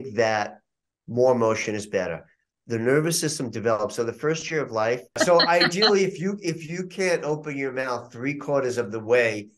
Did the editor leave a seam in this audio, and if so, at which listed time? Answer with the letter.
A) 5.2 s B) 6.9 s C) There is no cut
A